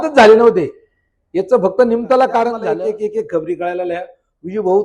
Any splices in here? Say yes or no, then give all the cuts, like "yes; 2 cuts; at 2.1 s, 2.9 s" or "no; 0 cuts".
yes; 1 cut; at 2.6 s